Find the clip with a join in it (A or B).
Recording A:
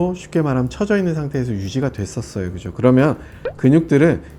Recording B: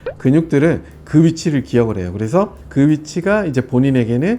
B